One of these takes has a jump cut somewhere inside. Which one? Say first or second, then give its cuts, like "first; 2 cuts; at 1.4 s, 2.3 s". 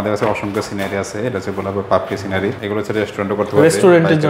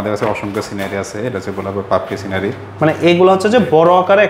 first; 1 cut; at 2.6 s